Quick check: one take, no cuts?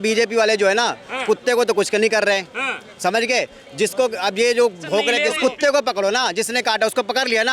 no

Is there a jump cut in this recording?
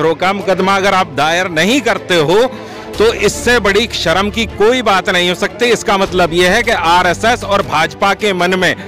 no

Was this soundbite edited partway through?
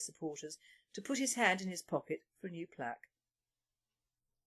no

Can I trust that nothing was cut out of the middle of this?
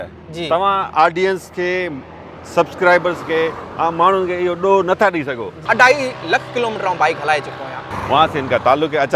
no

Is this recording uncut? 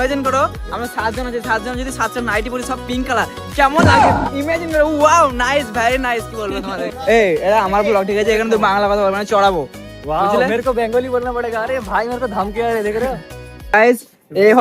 no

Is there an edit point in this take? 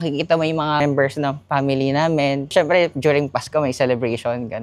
yes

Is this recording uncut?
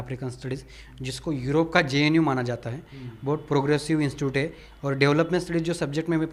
yes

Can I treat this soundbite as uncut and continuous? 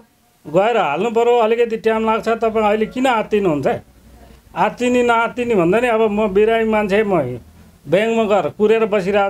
yes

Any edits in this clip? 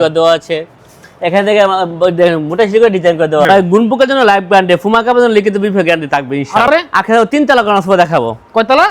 yes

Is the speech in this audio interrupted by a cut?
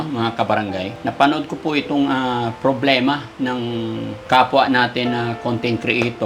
yes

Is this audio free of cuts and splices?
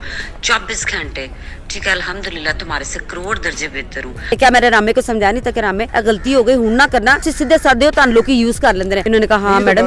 no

